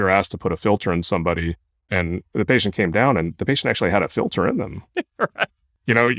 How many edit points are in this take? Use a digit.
1